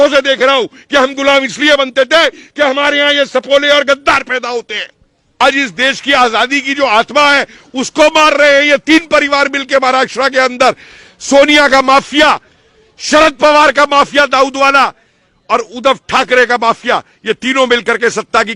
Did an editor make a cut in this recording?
yes; 1 cut; at 5.4 s

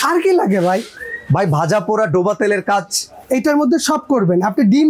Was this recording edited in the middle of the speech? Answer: no; 0 cuts

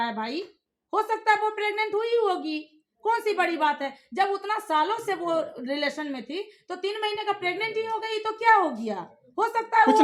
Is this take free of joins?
yes; 0 cuts

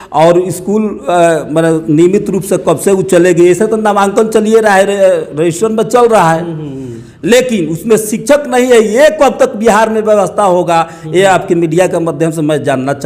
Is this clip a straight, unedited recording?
yes; 0 cuts

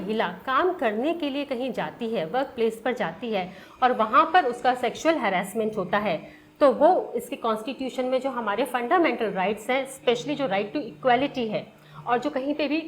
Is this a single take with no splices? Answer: yes; 0 cuts

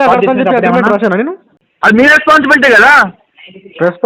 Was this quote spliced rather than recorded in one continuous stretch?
yes; 1 cut; at 1.6 s

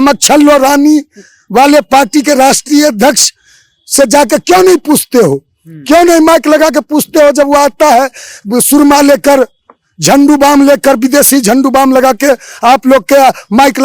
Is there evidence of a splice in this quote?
no; 0 cuts

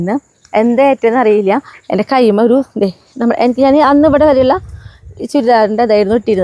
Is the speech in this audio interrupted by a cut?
no; 0 cuts

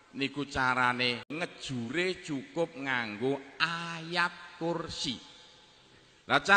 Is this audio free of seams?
no; 1 cut; at 1.3 s

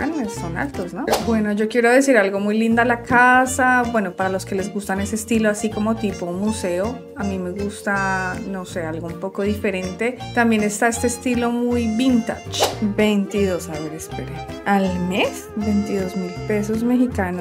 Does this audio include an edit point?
yes; 2 cuts; at 1.2 s, 12.6 s

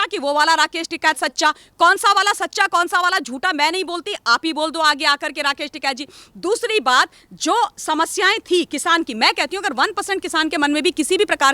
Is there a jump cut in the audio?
no; 0 cuts

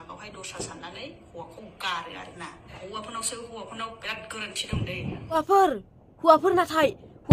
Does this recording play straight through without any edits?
no; 2 cuts; at 2.8 s, 5.3 s

